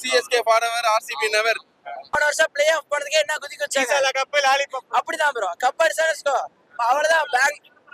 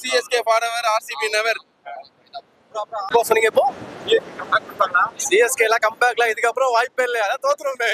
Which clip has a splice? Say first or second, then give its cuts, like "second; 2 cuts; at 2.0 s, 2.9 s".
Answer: first; 1 cut; at 1.9 s